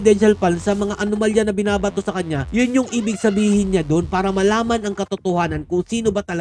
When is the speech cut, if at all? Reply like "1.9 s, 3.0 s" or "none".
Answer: none